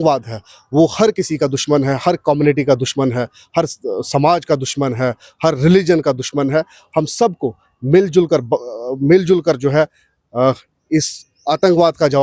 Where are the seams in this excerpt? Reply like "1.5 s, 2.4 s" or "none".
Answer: none

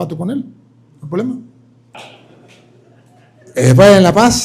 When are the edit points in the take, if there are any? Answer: 1.9 s

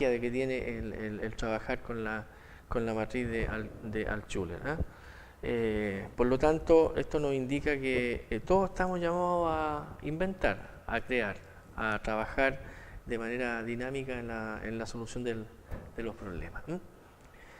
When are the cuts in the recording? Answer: 16.0 s

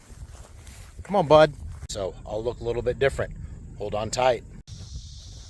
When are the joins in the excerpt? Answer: 1.9 s, 4.5 s

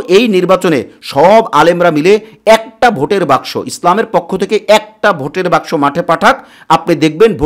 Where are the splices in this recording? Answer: none

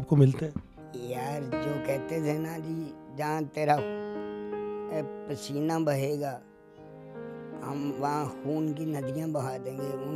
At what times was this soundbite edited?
0.9 s, 3.8 s, 4.9 s, 6.4 s, 7.6 s

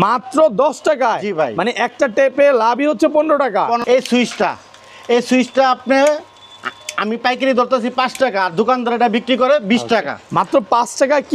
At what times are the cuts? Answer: 3.8 s

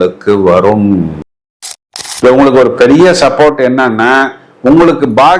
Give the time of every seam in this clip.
1.7 s

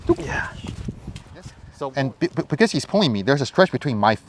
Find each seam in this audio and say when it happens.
1.6 s

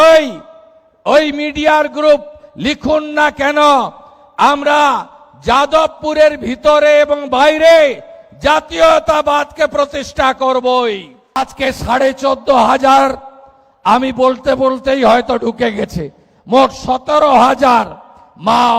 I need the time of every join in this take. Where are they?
11.4 s

